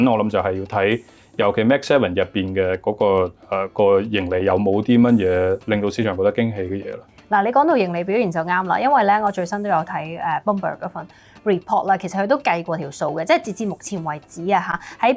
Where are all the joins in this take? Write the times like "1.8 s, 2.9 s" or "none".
none